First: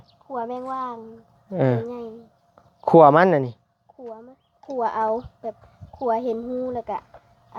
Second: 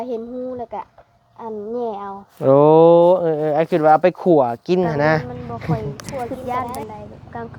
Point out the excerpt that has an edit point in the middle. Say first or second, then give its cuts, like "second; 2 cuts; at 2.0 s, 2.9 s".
second; 1 cut; at 6.3 s